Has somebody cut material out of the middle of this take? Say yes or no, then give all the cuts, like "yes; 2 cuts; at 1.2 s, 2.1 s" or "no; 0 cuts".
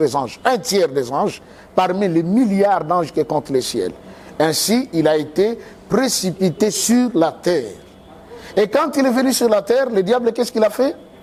no; 0 cuts